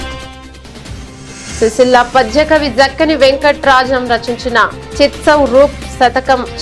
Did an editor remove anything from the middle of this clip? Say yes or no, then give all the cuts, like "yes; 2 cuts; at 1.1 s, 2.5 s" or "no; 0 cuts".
yes; 1 cut; at 1.1 s